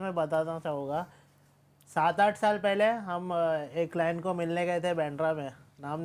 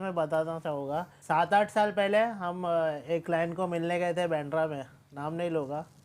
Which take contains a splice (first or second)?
second